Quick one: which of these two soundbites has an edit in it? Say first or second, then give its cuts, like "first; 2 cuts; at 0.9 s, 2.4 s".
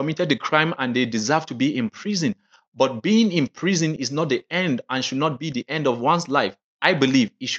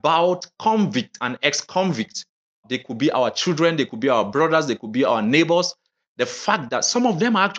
second; 1 cut; at 2.7 s